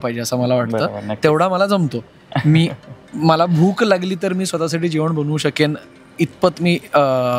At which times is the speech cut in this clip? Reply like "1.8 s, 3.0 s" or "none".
none